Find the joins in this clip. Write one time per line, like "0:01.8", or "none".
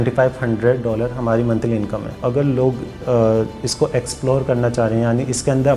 0:02.2